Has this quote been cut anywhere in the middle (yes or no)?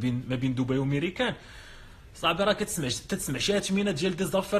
no